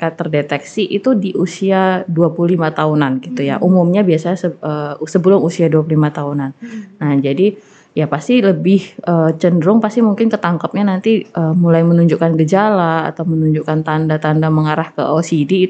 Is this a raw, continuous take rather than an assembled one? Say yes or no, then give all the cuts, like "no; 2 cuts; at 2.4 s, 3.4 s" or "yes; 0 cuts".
yes; 0 cuts